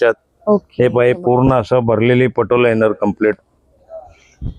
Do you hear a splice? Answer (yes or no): no